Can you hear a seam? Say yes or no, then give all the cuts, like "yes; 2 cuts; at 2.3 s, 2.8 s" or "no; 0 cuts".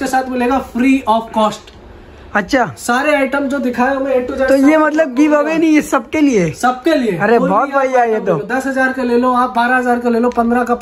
no; 0 cuts